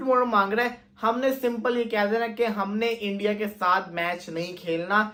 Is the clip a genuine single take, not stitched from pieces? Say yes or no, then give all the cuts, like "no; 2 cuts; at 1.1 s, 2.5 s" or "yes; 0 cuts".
yes; 0 cuts